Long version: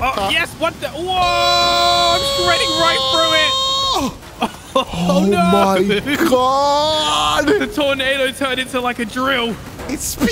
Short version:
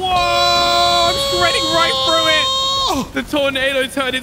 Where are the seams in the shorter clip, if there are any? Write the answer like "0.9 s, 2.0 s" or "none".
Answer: 3.2 s